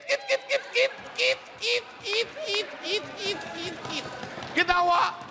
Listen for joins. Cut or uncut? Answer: uncut